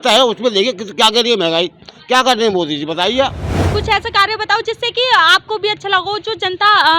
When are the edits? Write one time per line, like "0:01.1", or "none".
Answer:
0:03.6